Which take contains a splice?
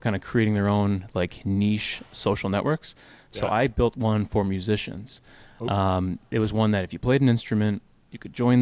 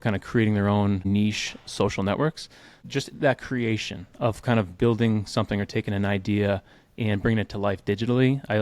second; 2 cuts; at 1.0 s, 2.8 s

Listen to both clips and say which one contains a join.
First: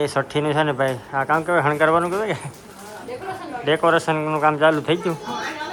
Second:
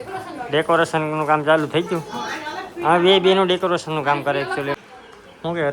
second; 1 cut; at 4.8 s

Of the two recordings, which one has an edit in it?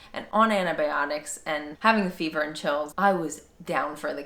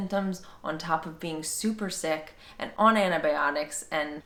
first; 1 cut; at 2.9 s

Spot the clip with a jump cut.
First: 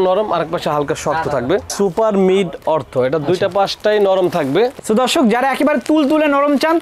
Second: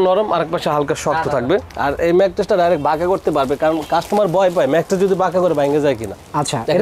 first; 1 cut; at 1.7 s

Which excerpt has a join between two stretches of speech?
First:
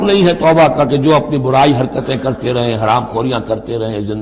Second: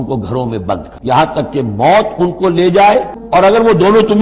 second; 2 cuts; at 0.9 s, 3.2 s

